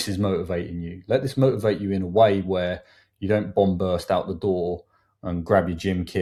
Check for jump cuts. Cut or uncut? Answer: uncut